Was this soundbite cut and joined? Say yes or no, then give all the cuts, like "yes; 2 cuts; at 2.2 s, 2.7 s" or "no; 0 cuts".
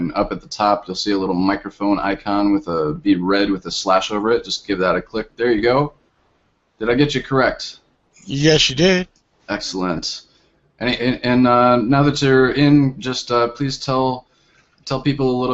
yes; 1 cut; at 1.7 s